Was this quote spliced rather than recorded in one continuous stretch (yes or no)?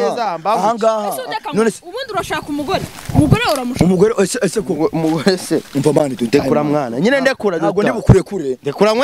no